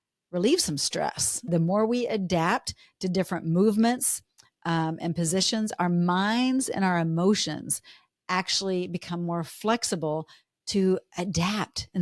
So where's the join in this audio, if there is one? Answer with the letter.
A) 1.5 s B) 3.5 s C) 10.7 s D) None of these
A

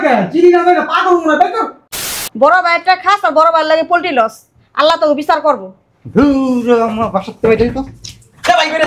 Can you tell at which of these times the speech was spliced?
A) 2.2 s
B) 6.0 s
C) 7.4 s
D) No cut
A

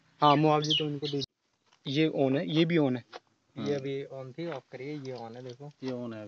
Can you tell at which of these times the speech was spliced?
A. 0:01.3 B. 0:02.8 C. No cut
A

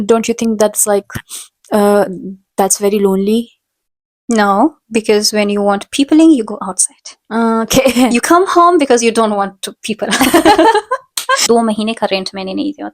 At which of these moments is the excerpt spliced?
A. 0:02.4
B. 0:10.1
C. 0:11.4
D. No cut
C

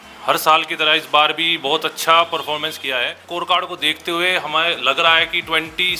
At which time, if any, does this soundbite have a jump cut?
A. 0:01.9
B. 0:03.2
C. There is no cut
B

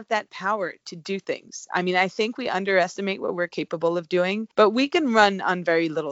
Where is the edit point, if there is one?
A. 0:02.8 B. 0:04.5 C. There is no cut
B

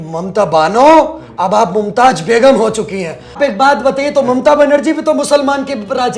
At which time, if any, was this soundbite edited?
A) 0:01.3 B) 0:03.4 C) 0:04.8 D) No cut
B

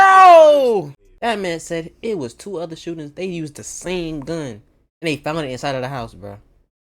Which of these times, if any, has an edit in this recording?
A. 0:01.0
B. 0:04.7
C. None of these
A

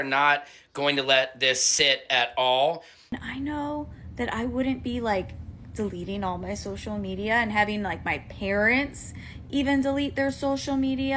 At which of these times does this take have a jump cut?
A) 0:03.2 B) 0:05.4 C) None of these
A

